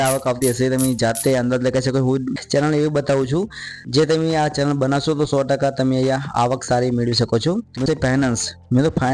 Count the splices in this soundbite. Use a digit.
2